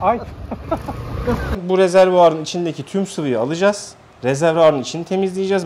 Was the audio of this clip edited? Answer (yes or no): yes